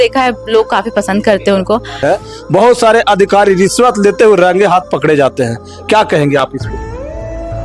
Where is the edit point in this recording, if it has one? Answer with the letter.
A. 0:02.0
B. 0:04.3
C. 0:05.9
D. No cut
A